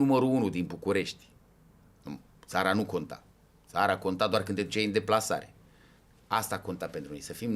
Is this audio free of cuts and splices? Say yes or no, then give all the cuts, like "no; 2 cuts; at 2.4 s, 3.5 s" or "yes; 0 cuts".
yes; 0 cuts